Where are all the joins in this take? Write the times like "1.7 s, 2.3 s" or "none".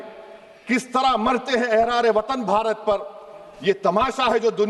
none